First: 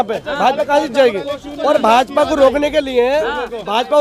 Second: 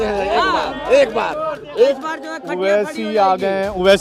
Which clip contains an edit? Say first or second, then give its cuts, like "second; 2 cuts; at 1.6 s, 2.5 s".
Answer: second; 1 cut; at 1.9 s